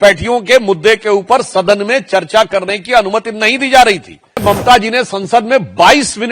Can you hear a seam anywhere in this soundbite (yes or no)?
yes